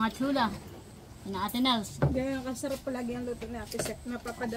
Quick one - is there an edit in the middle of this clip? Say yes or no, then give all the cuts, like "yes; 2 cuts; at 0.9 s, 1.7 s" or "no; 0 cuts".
no; 0 cuts